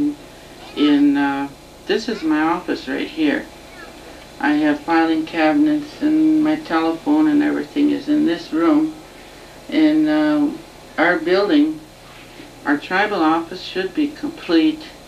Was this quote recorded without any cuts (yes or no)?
no